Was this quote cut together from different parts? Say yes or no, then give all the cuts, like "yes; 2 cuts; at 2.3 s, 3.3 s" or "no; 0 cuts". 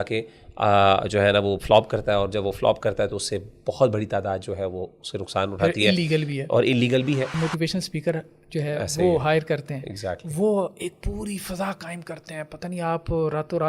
yes; 1 cut; at 7.3 s